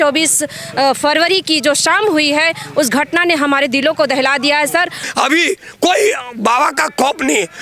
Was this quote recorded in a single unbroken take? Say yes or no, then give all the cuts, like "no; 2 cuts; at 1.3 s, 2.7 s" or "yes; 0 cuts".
no; 1 cut; at 5.0 s